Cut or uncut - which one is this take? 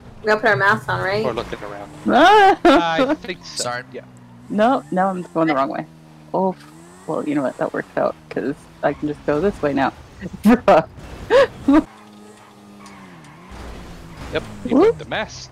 cut